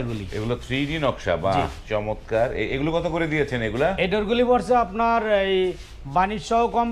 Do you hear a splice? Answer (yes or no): no